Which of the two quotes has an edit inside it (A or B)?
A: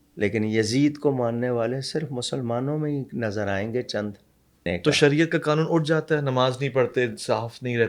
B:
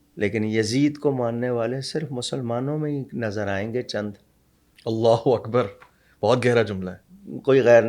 A